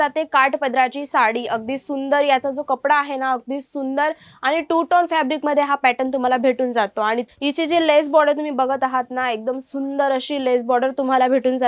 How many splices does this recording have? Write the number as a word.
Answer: one